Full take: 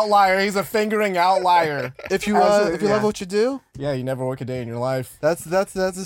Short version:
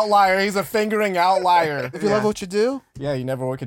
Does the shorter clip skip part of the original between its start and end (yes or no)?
yes